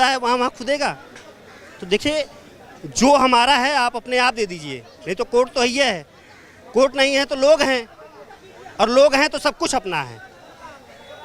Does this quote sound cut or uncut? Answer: uncut